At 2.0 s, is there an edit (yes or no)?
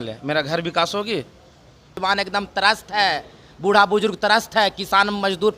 yes